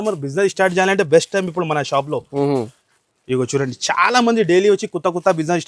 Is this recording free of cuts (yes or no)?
yes